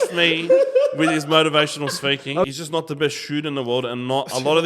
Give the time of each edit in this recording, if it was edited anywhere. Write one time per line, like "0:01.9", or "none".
0:02.5